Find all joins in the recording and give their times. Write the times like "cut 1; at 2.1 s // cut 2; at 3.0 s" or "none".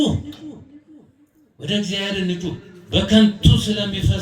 cut 1; at 2.7 s